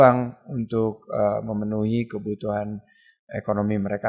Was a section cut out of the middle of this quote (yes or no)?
no